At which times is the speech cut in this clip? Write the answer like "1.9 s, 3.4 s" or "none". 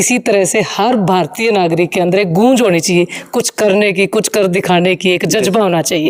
none